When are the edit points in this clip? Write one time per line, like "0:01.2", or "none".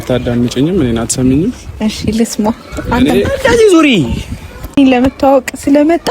0:04.8